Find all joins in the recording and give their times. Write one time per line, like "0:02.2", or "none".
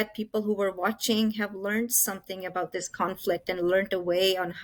none

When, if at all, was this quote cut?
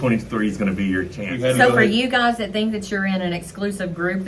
0:01.2

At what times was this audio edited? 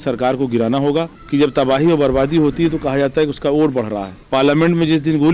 0:01.2
0:04.1

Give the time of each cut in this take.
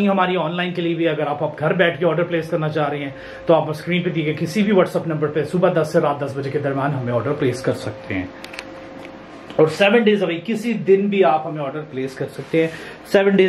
none

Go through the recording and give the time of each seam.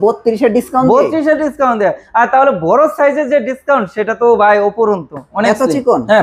0:05.3

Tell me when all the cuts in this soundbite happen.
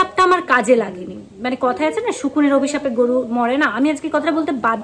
none

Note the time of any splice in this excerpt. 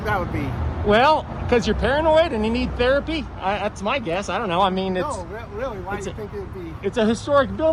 none

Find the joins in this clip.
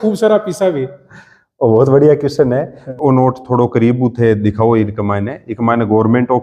0:02.9

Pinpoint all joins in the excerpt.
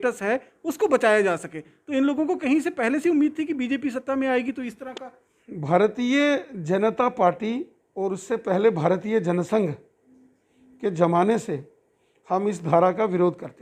none

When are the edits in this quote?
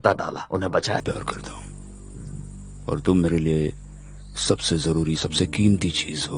0:01.0

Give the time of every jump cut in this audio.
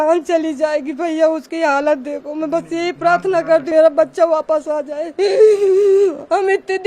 0:03.7

